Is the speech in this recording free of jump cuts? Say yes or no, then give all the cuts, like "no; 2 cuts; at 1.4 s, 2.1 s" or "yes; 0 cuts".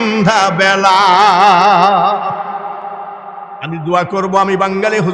yes; 0 cuts